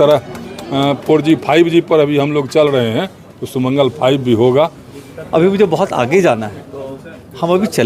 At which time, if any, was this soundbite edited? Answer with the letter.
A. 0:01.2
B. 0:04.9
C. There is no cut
B